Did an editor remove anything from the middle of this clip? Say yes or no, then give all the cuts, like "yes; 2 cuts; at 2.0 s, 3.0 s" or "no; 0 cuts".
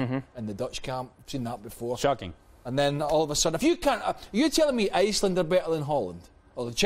no; 0 cuts